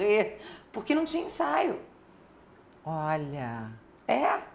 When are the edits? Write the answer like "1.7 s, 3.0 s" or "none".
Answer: none